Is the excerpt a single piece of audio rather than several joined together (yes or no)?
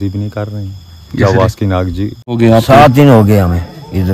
no